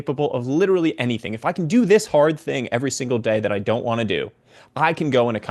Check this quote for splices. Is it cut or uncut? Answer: uncut